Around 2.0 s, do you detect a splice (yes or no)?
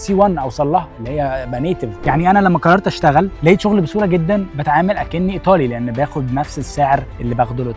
yes